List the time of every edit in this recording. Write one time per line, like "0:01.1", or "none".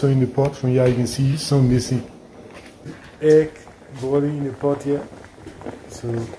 0:02.9